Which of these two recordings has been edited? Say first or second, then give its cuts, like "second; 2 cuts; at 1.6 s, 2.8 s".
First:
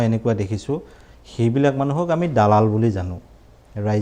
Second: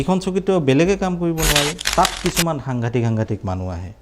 second; 1 cut; at 1.8 s